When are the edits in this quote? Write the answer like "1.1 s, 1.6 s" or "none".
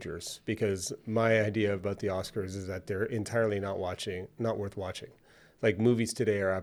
none